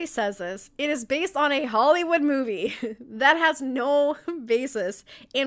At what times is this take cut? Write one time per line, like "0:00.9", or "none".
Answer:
none